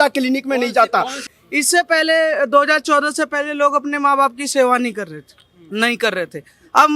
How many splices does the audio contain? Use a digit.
1